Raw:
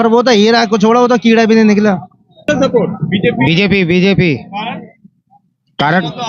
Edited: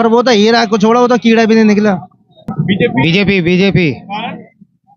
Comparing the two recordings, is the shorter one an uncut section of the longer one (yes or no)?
no